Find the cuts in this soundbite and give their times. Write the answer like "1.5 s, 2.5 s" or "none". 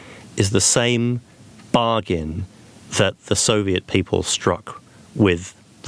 none